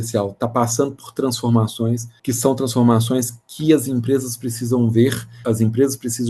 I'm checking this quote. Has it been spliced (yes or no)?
yes